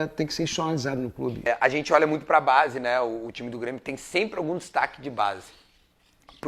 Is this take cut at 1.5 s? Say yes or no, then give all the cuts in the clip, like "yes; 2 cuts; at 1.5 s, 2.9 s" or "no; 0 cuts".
yes; 1 cut; at 1.5 s